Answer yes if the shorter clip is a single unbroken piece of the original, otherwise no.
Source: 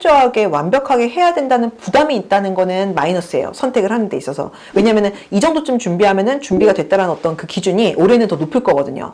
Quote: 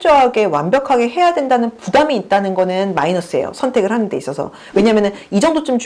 yes